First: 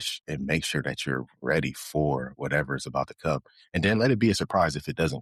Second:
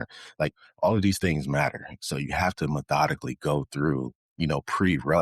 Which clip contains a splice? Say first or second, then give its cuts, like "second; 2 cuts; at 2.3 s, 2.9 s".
second; 1 cut; at 4.2 s